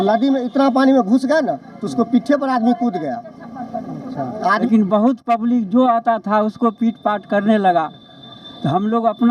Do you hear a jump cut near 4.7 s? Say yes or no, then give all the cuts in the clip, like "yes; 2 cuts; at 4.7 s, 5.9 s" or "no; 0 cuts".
yes; 1 cut; at 4.7 s